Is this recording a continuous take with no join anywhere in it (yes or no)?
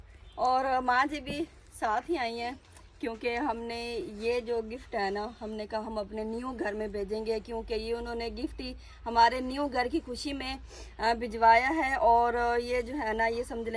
yes